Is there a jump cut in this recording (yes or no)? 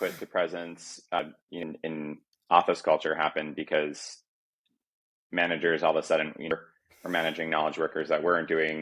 yes